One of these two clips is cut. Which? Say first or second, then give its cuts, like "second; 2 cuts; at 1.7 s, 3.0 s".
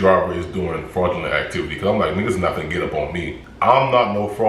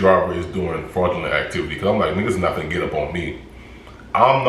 first; 1 cut; at 3.4 s